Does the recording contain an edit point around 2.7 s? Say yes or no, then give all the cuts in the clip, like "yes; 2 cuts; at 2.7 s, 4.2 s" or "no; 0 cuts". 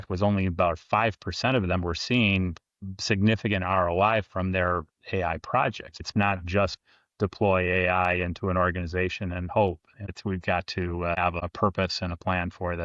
no; 3 cuts; at 6.0 s, 10.1 s, 11.4 s